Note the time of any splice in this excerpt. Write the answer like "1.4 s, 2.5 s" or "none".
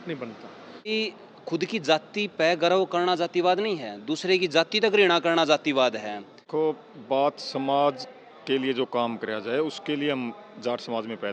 0.9 s, 6.4 s